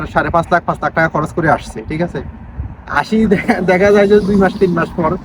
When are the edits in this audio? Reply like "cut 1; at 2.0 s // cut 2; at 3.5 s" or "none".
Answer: none